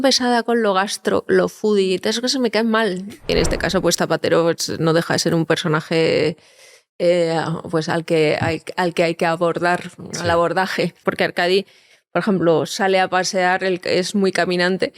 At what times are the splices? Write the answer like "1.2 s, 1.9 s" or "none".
3.3 s, 11.0 s